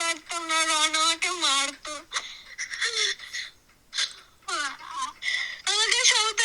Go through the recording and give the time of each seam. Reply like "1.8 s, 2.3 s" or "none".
none

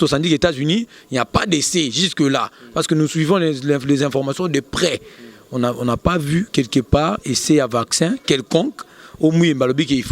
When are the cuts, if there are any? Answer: none

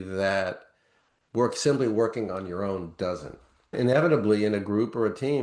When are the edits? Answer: 3.8 s

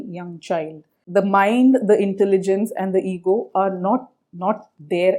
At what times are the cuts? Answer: 0.9 s

